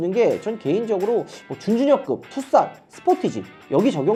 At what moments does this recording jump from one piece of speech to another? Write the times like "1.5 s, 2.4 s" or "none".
none